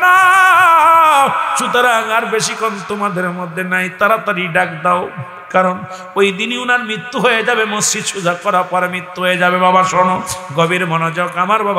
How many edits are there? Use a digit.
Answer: 0